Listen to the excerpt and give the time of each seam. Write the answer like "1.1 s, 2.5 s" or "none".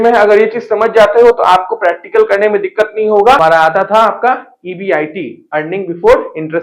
3.4 s